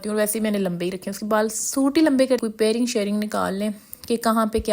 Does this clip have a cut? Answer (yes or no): yes